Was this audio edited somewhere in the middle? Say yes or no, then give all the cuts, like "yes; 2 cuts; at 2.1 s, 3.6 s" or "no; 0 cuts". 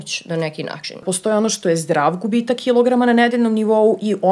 yes; 1 cut; at 1.0 s